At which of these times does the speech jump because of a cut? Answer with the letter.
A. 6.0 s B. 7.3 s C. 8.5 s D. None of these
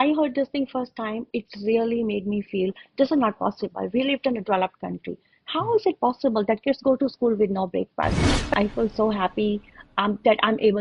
C